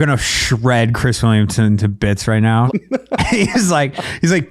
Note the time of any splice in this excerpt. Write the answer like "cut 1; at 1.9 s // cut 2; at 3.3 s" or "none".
cut 1; at 2.7 s